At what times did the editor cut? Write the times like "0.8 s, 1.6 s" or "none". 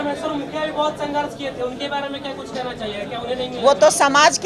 none